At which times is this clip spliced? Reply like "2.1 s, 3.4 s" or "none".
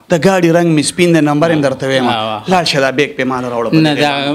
none